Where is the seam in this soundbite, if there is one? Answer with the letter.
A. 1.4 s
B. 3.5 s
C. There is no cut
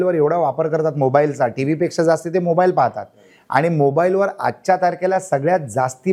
C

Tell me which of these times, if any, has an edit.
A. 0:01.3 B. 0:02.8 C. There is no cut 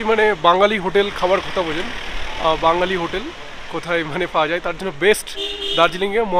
C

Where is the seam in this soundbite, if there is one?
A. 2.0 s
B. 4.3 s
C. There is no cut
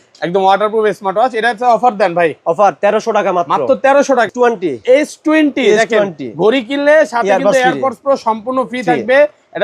B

